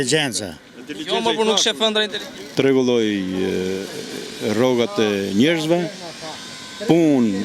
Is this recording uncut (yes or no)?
no